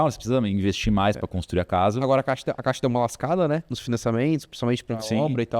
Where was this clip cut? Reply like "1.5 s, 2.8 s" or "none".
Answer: none